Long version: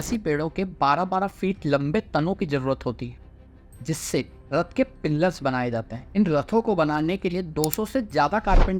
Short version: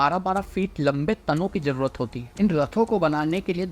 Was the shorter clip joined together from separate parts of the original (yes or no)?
yes